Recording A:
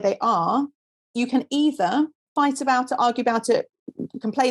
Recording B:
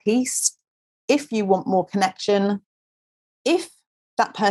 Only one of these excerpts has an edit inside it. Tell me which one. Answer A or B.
A